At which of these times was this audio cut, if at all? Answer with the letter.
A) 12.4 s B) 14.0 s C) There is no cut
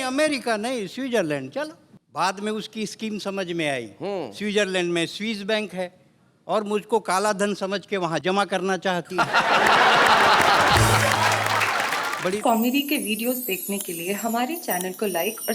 A